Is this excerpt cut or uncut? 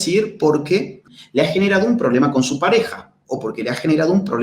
cut